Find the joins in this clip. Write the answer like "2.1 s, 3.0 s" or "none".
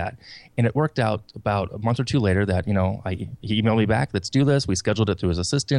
none